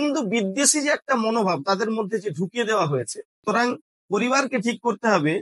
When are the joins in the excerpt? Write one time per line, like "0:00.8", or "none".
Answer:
0:03.4